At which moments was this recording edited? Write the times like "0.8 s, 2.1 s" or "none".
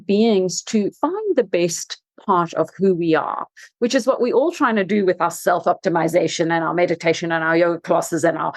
1.0 s